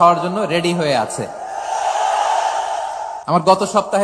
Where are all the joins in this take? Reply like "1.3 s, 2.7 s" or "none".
3.1 s